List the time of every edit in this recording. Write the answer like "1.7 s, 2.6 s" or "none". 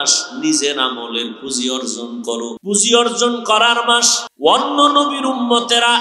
2.6 s, 4.2 s